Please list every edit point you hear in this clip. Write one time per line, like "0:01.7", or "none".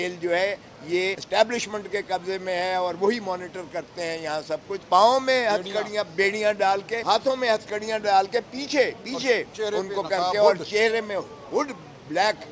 0:01.2
0:04.8
0:07.0